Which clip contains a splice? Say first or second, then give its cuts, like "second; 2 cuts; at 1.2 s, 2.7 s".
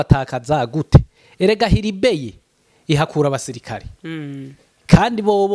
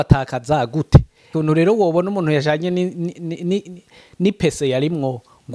second; 1 cut; at 1.3 s